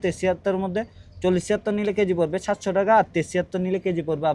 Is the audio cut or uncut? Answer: uncut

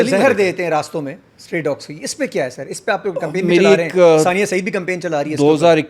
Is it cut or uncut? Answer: uncut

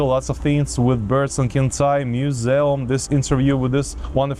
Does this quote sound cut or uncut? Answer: uncut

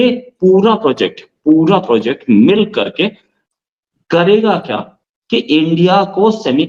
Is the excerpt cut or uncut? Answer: uncut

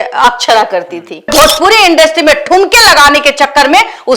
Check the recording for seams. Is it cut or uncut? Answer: cut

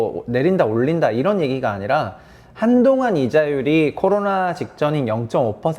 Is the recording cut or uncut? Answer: uncut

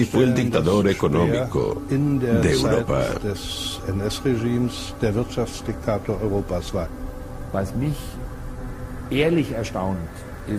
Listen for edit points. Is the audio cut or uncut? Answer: cut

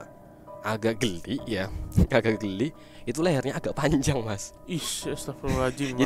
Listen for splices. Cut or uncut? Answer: uncut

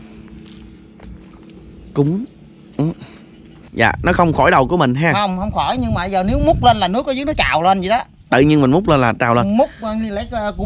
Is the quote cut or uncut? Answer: cut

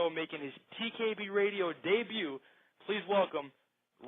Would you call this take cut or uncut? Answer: cut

